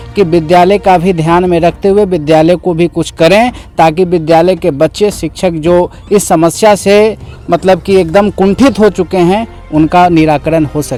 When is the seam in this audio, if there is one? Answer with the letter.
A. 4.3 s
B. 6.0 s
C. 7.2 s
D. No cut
D